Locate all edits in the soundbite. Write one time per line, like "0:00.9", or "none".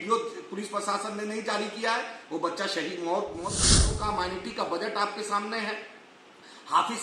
0:03.8